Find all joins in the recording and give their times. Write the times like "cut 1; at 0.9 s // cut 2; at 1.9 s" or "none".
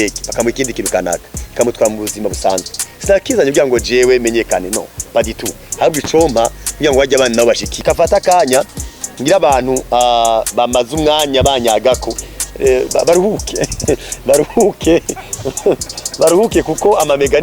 cut 1; at 7.7 s

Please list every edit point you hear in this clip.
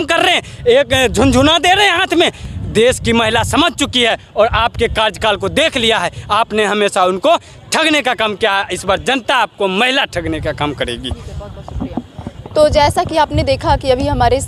none

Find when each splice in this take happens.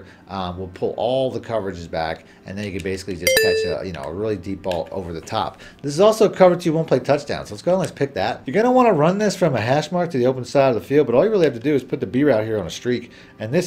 none

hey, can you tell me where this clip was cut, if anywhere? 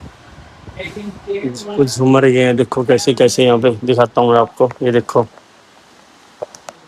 none

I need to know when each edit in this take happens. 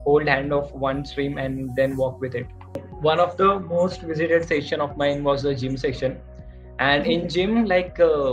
cut 1; at 2.8 s

